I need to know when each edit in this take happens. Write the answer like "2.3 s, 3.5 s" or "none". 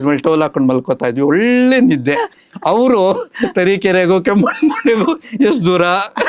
2.5 s